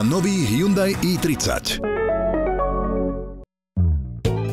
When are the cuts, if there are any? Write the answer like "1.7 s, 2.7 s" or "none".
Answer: 3.4 s